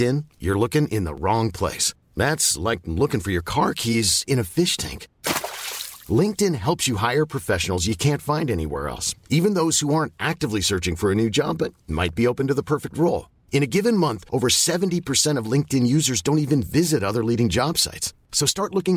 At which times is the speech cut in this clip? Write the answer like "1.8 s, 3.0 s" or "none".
none